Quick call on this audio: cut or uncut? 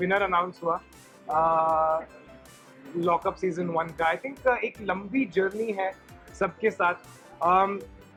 uncut